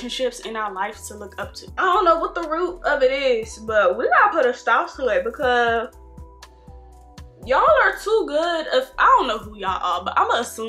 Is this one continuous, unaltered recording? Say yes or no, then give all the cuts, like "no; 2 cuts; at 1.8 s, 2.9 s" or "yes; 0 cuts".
yes; 0 cuts